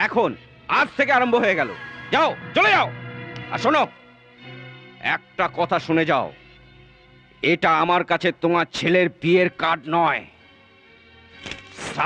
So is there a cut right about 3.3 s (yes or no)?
no